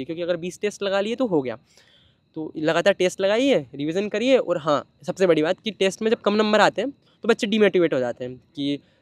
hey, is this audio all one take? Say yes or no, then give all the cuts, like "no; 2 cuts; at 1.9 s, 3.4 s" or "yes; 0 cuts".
yes; 0 cuts